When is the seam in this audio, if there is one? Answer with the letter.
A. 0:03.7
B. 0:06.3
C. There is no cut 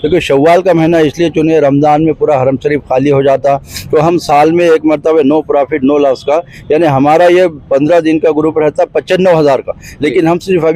A